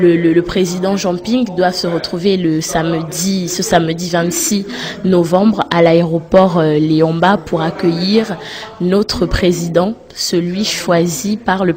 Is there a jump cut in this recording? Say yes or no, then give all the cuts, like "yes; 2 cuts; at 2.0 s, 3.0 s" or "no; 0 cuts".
yes; 1 cut; at 3.0 s